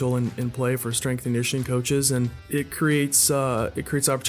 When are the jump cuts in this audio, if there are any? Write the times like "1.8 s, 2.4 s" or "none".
2.4 s